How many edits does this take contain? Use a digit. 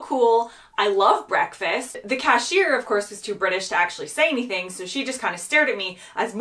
1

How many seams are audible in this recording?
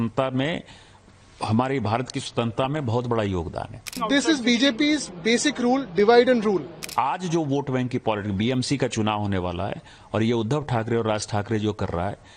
2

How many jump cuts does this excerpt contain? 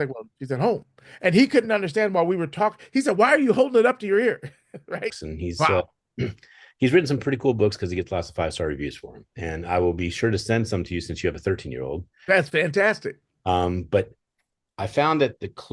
1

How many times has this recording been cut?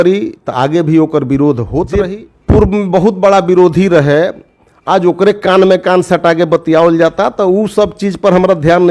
1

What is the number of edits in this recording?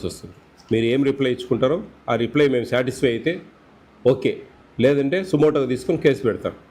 0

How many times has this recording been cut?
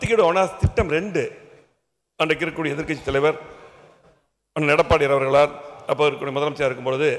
0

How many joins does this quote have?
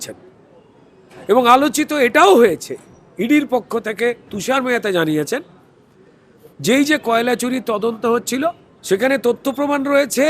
1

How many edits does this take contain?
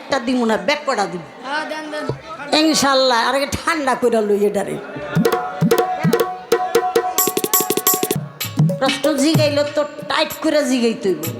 1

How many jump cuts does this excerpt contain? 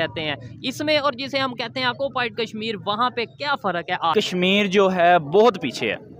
1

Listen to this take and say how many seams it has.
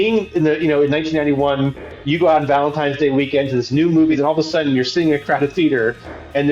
1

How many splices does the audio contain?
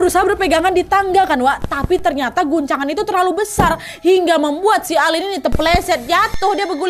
0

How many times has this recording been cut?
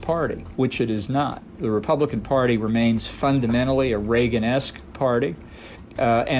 1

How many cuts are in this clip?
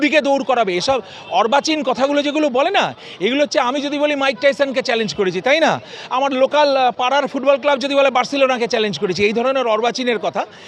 0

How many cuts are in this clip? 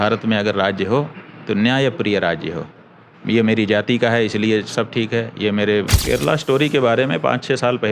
1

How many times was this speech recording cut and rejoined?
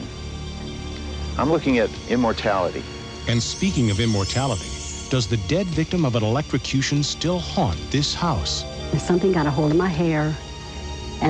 1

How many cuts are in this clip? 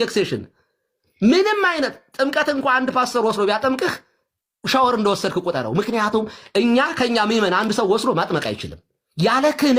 0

